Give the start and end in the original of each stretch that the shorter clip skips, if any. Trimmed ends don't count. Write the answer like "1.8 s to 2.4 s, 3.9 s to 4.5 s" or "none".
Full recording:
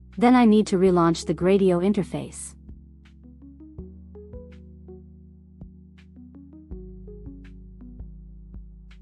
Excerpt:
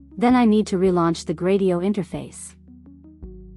2.4 s to 5.9 s